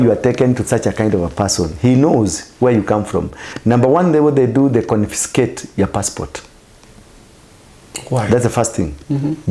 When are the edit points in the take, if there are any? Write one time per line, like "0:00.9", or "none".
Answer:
none